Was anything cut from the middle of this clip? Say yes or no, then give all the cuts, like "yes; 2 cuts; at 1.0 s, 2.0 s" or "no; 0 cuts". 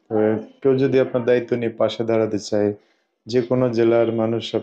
no; 0 cuts